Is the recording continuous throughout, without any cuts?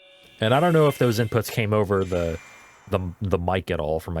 yes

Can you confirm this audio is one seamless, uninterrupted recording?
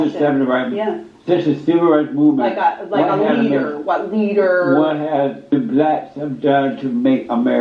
no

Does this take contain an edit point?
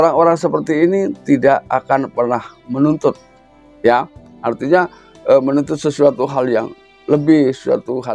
no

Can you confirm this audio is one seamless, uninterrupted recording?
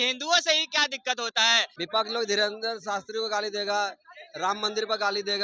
no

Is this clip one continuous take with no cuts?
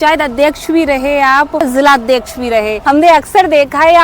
no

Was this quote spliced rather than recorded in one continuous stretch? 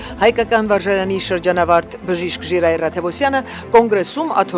no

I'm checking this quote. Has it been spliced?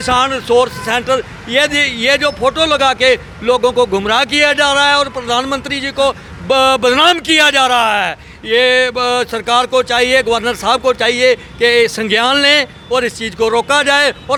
no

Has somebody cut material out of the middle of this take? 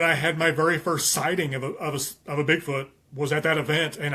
no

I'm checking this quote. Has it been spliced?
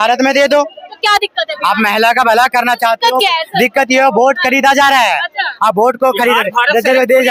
no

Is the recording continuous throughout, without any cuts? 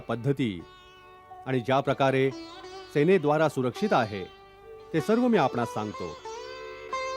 yes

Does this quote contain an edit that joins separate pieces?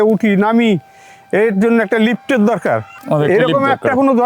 yes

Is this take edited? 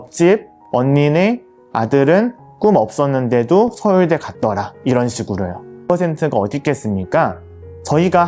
yes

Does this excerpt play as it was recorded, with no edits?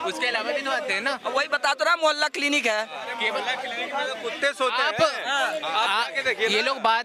yes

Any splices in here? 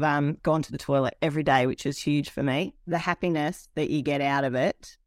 yes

